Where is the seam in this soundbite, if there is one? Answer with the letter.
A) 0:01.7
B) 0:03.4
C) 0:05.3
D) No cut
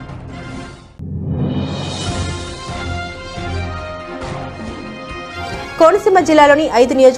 D